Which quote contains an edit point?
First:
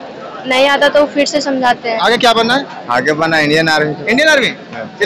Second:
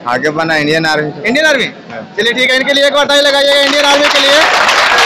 first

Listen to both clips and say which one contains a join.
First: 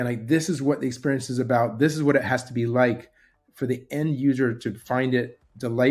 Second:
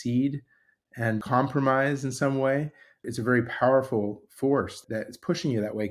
second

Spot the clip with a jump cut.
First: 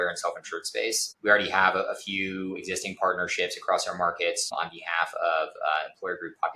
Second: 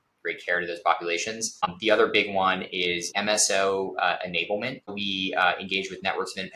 second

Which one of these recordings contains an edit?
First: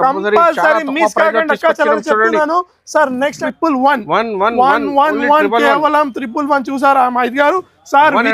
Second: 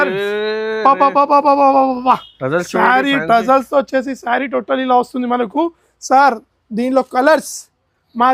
first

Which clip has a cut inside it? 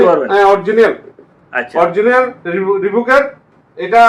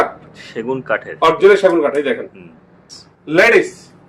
second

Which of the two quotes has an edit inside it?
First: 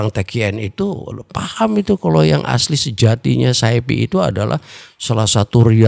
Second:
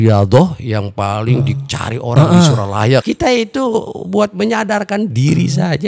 second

